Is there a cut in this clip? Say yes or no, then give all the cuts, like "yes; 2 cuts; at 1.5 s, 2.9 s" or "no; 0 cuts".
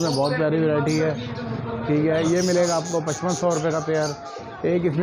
no; 0 cuts